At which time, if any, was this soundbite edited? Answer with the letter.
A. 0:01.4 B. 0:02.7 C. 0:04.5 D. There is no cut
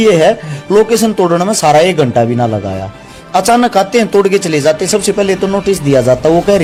D